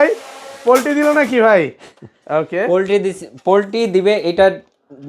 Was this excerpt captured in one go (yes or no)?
yes